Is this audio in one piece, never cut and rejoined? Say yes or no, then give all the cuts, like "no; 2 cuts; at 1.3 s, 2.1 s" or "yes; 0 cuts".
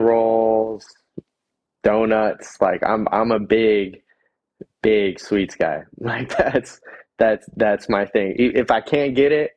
yes; 0 cuts